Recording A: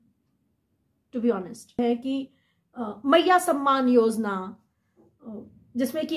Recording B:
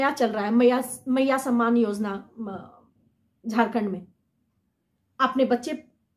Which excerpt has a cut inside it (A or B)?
A